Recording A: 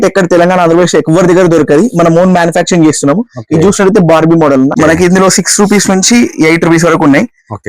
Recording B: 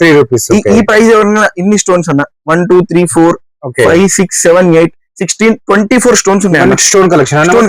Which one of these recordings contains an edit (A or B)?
A